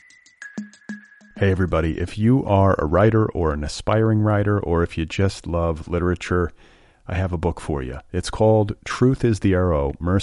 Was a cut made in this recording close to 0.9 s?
yes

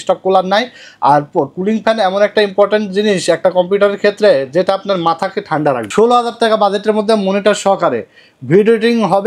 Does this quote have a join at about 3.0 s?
no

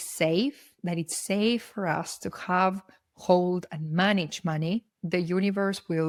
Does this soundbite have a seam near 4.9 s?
no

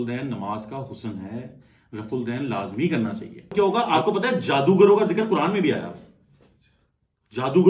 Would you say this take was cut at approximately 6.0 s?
no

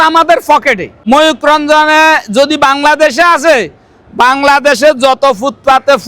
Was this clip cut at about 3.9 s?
no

